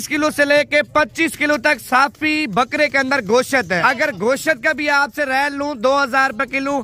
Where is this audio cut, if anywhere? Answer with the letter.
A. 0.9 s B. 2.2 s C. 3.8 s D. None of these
C